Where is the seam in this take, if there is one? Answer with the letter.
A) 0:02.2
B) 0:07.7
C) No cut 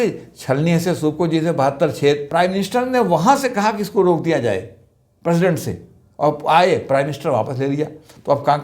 A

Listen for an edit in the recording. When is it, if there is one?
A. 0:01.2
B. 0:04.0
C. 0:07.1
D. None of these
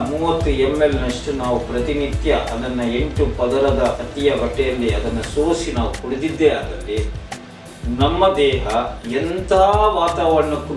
B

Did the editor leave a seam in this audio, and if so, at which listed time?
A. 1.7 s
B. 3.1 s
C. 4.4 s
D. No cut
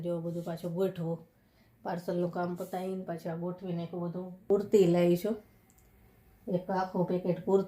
C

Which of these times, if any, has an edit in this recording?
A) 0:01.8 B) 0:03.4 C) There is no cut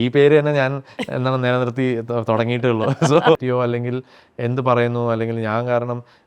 B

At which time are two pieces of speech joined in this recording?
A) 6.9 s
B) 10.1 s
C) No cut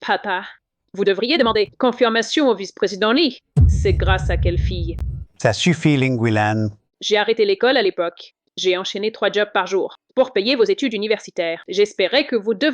A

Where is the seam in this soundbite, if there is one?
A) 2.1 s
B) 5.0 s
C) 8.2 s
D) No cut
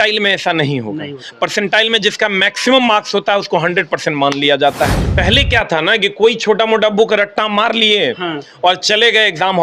B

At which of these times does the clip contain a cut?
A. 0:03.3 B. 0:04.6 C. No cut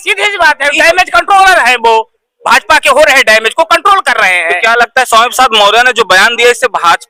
C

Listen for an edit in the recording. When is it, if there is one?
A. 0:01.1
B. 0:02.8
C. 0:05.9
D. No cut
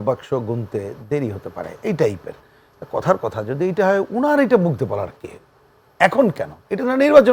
D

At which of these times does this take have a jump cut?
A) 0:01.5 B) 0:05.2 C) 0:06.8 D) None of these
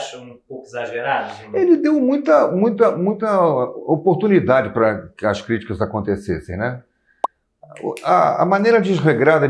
D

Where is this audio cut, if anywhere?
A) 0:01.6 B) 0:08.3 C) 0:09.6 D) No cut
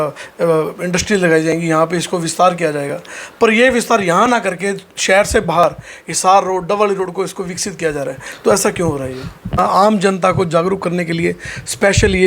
C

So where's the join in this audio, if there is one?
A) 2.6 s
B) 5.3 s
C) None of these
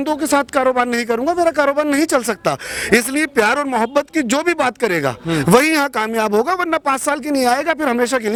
C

